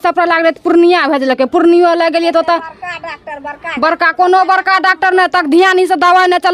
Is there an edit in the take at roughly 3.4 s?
no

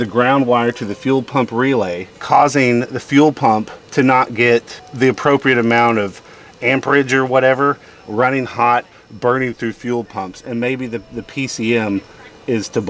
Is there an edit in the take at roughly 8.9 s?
no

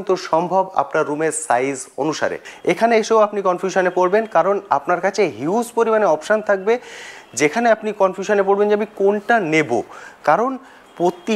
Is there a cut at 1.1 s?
no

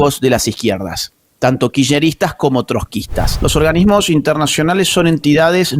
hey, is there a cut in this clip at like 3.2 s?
yes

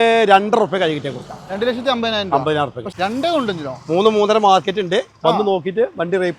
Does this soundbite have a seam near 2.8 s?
yes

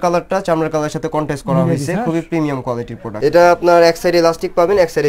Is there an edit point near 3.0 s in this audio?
yes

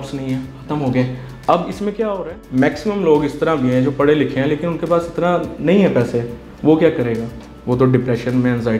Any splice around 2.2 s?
yes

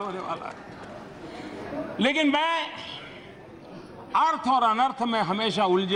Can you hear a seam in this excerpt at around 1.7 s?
no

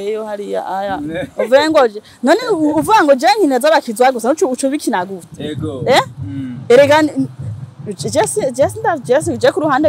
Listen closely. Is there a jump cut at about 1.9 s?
no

